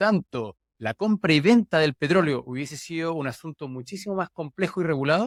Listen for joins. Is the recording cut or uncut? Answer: uncut